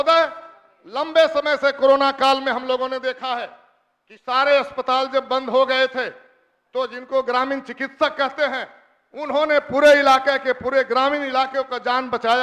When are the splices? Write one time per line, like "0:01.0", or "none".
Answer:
none